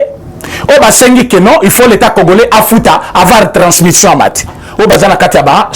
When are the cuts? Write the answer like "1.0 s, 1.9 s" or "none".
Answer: 4.6 s